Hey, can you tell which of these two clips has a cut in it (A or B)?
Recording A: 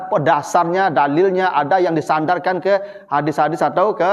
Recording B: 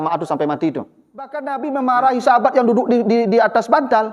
B